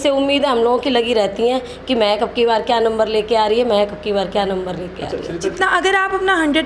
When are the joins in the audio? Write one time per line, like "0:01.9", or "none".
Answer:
0:05.5

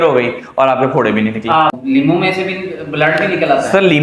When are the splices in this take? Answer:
0:01.8

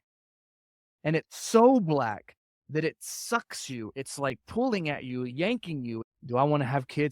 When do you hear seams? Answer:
0:06.0

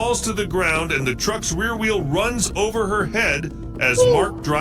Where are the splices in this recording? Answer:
none

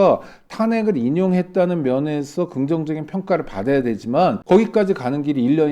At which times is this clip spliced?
0:04.4

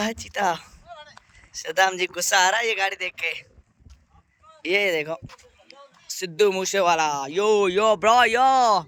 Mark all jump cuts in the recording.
none

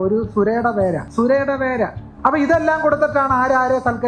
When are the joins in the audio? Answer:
0:01.0
0:02.0

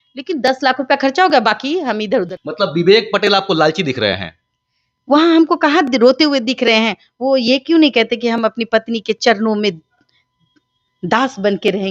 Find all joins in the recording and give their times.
0:02.3

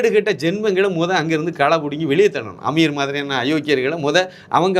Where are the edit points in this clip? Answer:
none

